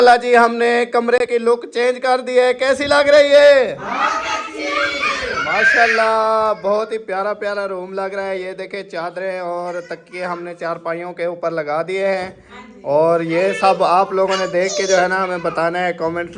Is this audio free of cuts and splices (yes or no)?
yes